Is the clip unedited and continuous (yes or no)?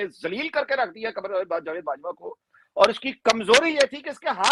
yes